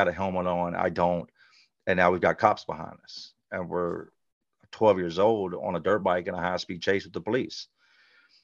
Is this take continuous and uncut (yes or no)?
yes